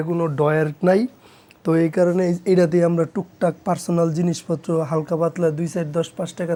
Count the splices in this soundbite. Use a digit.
0